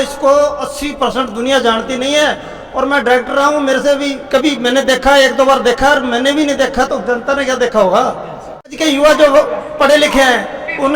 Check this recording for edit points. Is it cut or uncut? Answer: cut